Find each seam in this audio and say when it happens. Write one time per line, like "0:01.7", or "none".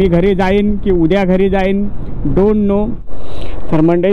0:03.1